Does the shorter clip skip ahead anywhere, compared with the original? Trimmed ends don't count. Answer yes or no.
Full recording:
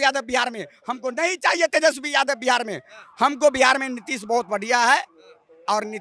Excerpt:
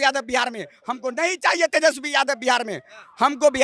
no